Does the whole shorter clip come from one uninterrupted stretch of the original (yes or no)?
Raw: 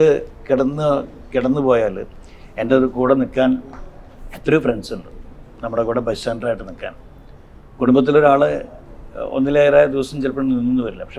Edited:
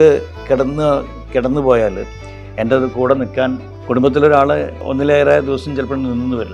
no